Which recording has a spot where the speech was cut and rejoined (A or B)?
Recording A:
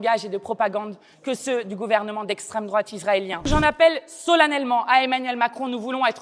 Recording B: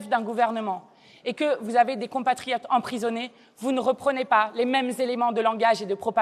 A